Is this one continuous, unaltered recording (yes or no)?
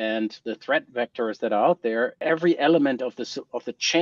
no